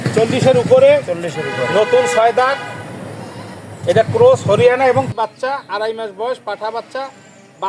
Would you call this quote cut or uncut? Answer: cut